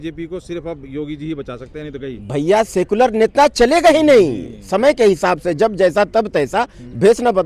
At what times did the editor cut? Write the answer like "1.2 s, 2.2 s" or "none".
none